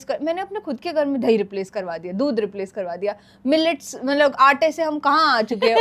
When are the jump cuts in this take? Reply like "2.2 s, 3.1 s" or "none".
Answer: none